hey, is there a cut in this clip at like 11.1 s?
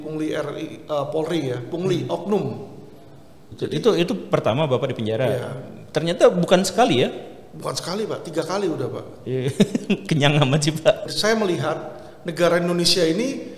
yes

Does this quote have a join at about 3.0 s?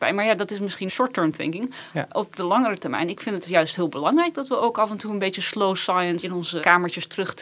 no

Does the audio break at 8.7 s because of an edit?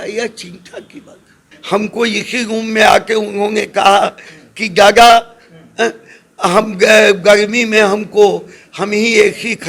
no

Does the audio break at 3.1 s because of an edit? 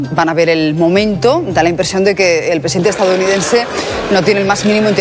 no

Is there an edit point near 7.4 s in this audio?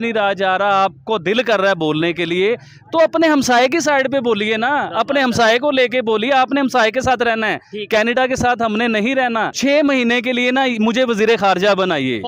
no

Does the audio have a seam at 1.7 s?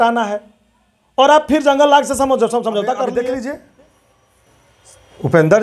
no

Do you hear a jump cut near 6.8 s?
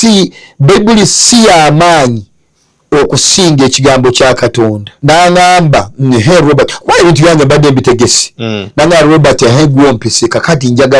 no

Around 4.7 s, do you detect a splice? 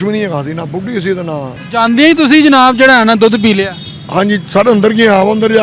no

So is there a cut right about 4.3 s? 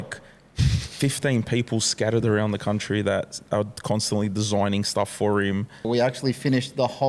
no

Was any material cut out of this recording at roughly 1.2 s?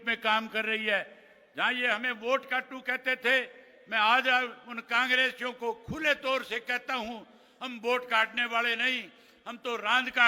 no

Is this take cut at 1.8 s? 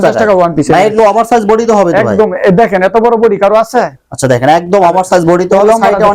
no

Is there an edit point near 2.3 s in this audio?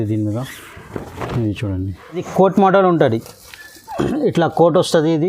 yes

